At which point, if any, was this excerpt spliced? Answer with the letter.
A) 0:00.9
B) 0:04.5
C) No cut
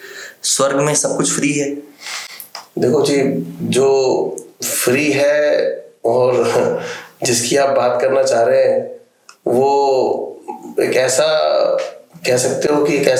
C